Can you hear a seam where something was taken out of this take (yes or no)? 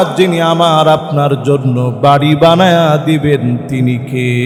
no